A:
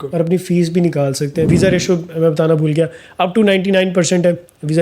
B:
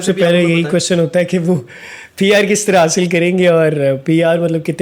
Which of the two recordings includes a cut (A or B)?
A